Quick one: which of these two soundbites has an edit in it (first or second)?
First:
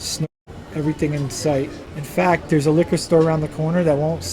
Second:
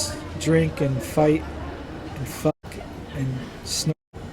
first